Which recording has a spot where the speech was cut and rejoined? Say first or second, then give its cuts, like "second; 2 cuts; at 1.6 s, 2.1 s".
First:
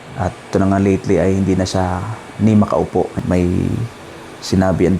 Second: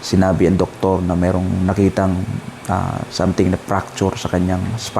first; 1 cut; at 3.1 s